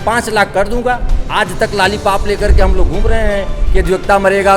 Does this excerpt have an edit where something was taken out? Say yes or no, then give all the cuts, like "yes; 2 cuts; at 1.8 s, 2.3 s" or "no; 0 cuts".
no; 0 cuts